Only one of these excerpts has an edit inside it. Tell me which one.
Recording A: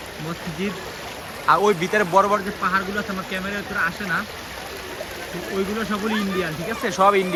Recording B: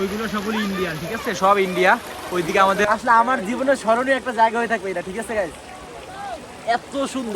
B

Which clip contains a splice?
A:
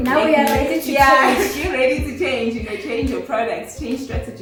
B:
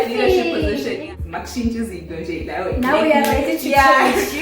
B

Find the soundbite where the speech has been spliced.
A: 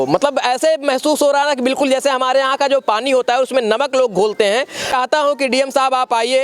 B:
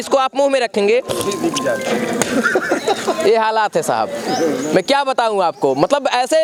A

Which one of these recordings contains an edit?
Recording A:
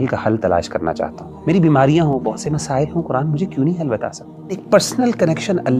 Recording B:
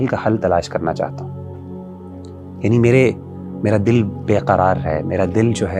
A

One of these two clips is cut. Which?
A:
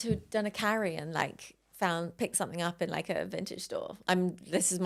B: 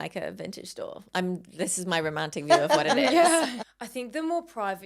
B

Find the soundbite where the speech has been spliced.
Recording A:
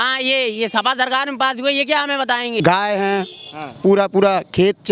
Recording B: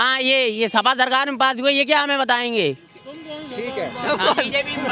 A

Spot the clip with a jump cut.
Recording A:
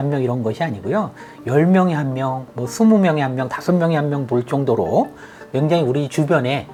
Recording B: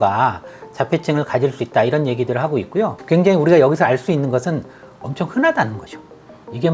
B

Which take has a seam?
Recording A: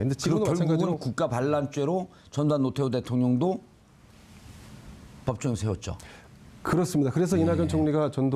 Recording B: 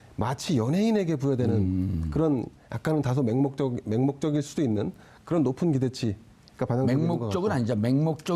B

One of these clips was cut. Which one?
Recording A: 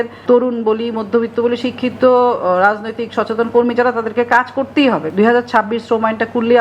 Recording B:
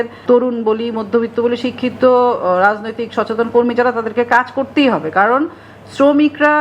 A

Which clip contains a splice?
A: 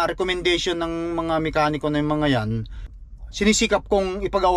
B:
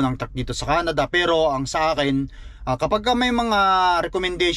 A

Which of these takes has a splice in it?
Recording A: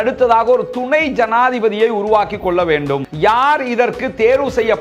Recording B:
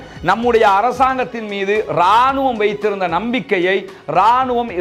A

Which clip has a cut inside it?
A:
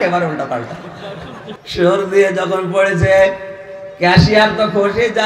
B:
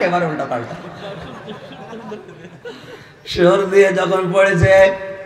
A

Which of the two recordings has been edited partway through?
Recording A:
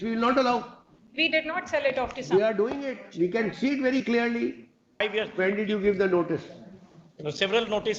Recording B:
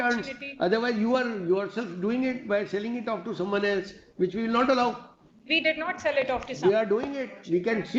A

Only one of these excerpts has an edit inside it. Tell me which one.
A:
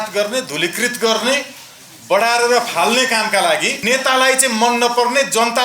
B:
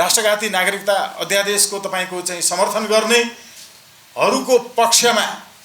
A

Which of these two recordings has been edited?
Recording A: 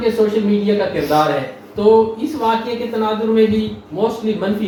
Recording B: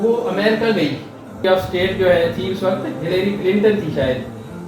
B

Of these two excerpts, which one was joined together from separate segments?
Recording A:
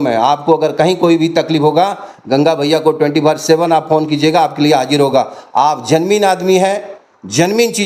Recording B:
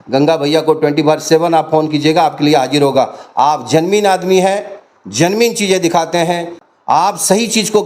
B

